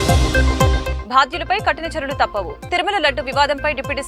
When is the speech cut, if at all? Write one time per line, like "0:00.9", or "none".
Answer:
0:00.9